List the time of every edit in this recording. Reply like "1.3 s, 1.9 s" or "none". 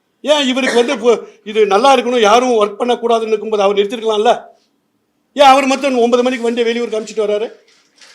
none